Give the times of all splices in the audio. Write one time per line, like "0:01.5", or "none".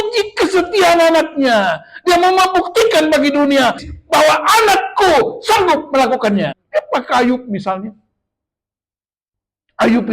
0:03.8
0:06.6